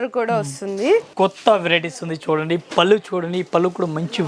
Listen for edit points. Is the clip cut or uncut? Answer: cut